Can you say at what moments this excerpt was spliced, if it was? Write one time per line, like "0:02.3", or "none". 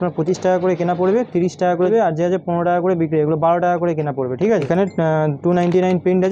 0:01.9
0:04.6